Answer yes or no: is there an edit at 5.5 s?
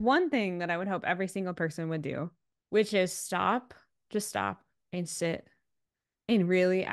no